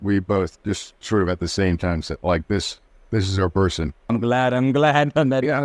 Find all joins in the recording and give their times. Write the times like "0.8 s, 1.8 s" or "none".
none